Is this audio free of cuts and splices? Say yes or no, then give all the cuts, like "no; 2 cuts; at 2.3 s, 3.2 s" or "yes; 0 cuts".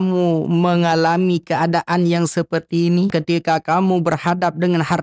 no; 1 cut; at 3.1 s